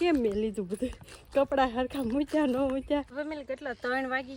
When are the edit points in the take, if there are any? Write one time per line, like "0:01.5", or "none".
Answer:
0:03.2